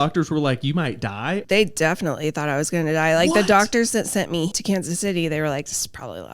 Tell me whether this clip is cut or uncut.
cut